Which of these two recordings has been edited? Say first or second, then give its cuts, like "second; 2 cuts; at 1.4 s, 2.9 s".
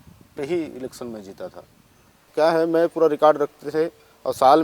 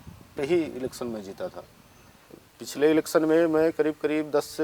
first; 1 cut; at 2.2 s